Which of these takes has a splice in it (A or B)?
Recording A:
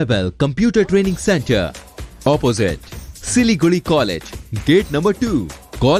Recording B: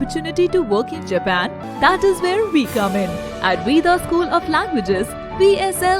B